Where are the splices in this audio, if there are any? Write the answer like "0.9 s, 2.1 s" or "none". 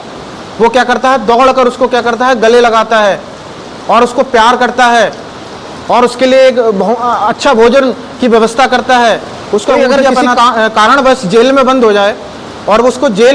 10.4 s